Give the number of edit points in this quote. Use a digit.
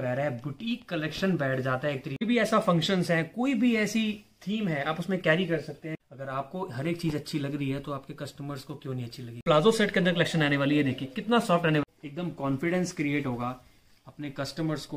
4